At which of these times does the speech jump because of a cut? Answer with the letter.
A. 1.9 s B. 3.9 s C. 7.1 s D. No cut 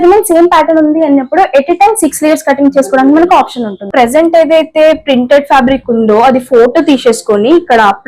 B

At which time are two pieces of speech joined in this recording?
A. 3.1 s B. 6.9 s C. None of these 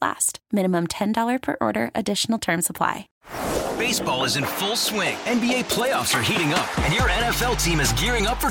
A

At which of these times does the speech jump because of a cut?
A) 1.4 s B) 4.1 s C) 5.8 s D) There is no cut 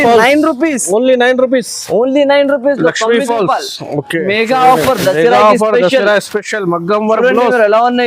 B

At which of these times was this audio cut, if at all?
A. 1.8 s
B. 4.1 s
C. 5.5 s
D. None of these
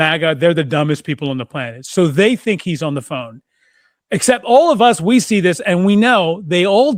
D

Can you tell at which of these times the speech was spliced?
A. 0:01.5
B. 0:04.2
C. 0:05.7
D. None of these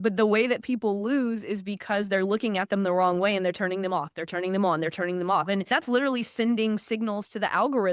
C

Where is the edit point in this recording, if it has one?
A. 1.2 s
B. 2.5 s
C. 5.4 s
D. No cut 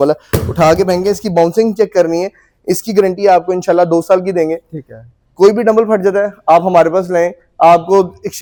D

